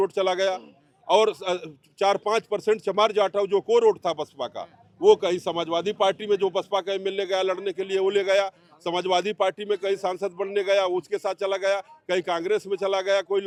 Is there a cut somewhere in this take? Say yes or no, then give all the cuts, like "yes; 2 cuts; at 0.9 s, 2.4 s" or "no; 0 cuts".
no; 0 cuts